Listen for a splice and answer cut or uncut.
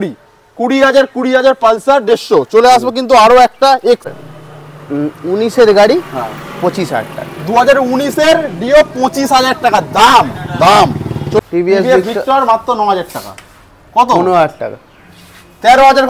cut